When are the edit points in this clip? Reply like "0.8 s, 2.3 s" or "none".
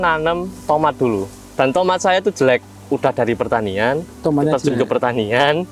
none